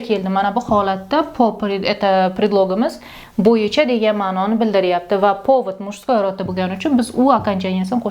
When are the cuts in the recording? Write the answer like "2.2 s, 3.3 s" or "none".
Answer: none